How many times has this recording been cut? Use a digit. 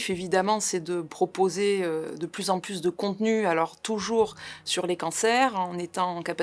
0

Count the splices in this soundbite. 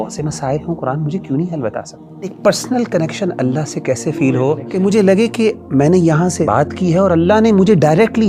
3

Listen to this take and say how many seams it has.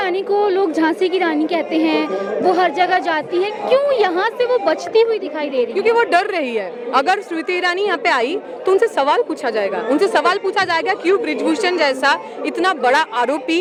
0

